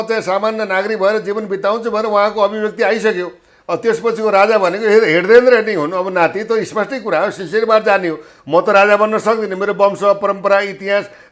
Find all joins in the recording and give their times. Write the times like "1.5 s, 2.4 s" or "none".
none